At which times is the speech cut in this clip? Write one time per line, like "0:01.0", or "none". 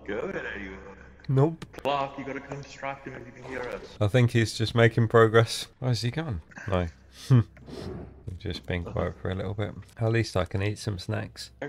none

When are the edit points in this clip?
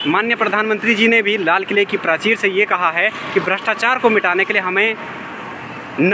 none

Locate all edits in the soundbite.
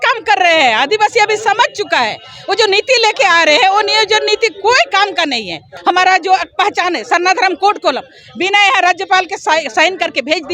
0:05.7

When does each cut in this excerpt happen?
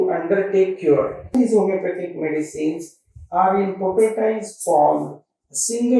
0:01.3

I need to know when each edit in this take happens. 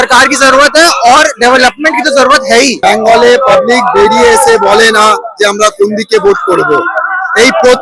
0:02.8

